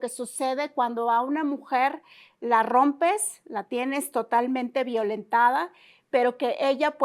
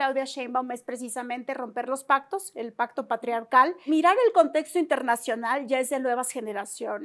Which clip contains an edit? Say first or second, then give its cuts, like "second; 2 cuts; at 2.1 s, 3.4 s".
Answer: second; 1 cut; at 3.8 s